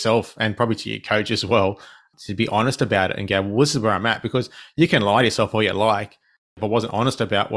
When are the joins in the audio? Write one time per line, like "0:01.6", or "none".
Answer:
0:06.6